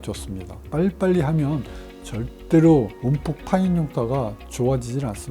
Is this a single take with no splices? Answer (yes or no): yes